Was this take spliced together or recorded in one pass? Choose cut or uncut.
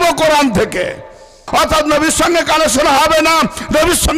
cut